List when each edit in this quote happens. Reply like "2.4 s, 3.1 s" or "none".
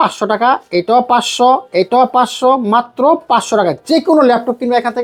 none

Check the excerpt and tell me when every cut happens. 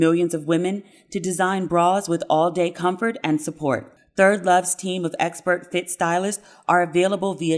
4.0 s

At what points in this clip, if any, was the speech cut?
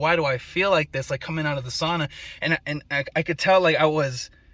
none

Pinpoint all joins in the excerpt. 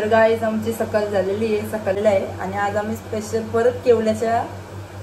2.0 s

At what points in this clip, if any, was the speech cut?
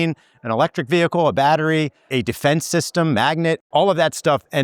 2.1 s, 3.6 s

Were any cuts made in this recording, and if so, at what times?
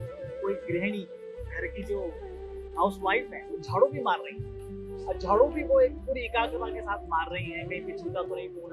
none

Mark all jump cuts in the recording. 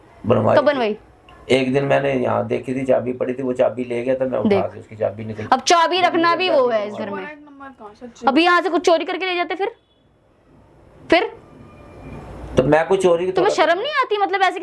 none

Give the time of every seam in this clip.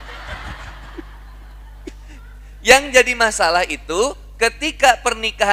none

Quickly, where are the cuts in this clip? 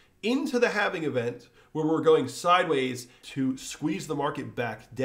3.2 s

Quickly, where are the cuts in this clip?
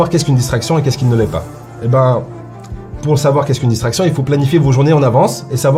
none

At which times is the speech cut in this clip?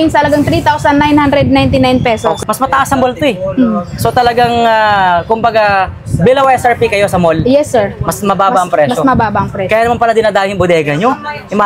2.4 s

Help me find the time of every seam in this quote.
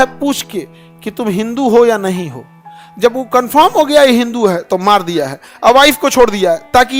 none

